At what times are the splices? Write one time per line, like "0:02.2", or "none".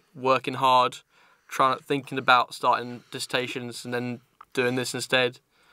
0:04.7